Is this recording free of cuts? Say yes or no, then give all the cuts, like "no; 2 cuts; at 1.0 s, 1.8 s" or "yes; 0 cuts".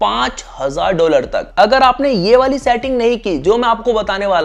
no; 1 cut; at 1.5 s